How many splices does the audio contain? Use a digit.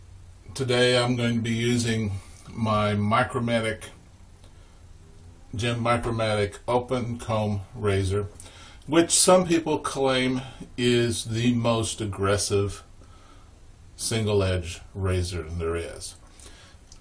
1